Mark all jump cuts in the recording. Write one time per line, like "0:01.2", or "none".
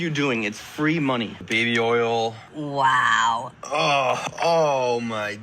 0:01.4
0:03.5